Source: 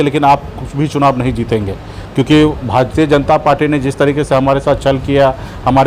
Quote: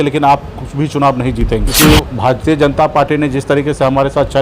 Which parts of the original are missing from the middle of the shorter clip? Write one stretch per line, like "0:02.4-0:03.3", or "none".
0:01.7-0:02.2